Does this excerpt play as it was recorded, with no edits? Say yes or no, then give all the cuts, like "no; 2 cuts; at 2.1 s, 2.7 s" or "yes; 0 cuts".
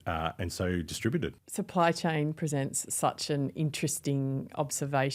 no; 1 cut; at 1.4 s